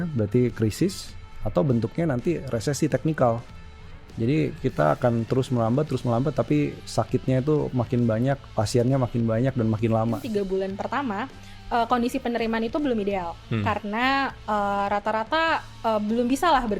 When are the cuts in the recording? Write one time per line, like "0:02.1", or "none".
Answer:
0:10.2